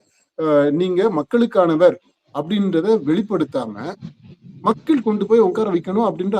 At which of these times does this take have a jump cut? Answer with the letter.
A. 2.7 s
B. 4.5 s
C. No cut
C